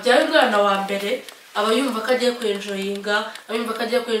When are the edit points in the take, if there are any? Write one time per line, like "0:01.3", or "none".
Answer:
none

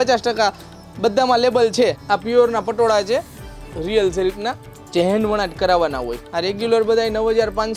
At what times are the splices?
0:02.0
0:06.2

